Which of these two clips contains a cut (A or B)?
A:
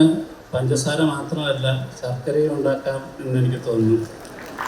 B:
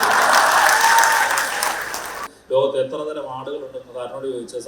B